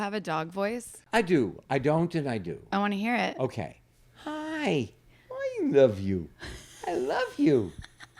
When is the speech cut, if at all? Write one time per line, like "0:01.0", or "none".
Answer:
0:01.0